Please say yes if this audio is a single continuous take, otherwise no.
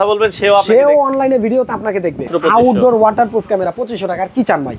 no